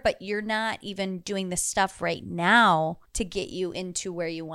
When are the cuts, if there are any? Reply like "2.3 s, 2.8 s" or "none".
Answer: none